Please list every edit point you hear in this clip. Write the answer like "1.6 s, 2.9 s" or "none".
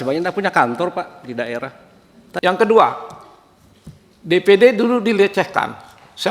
2.4 s